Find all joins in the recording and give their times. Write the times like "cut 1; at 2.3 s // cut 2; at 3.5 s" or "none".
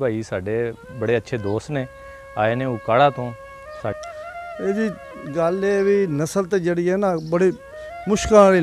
cut 1; at 4.0 s

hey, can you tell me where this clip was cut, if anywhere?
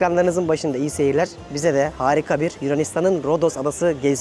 none

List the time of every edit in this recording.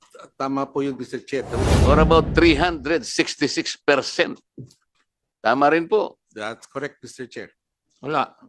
cut 1; at 1.6 s

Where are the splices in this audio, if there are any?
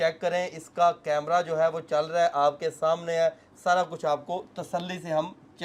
none

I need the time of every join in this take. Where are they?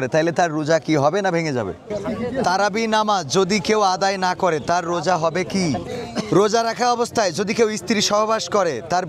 cut 1; at 1.9 s // cut 2; at 5.9 s

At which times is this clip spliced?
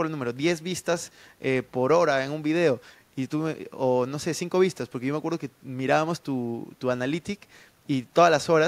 none

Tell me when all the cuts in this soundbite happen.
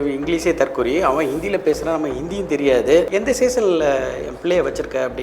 cut 1; at 3.1 s

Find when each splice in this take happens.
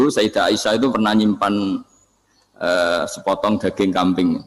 none

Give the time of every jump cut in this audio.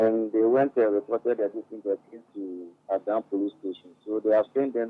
cut 1; at 2.7 s

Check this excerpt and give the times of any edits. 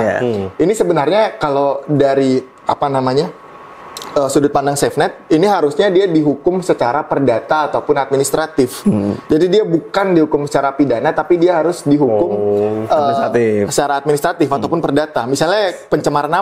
none

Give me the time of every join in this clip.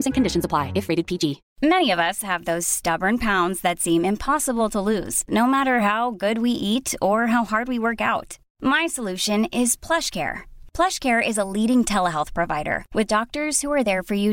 cut 1; at 1.5 s

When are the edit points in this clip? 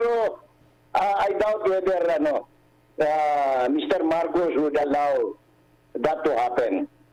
none

